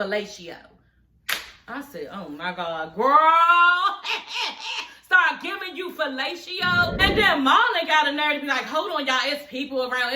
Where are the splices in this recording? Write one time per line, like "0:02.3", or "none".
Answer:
0:07.0